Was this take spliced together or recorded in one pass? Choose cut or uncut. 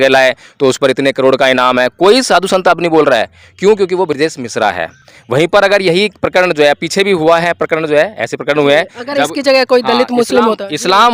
uncut